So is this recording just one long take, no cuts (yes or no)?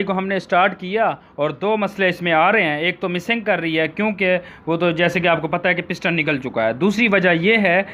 yes